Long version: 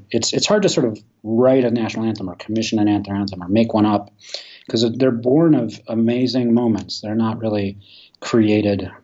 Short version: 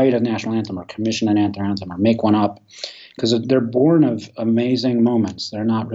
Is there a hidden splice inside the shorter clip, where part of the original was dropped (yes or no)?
no